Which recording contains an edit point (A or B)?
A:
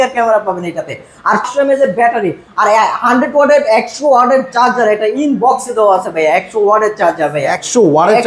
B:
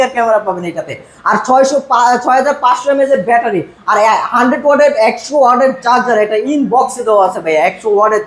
A